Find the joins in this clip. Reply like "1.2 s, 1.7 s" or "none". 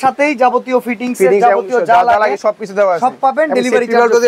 none